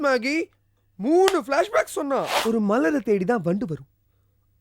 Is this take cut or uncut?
cut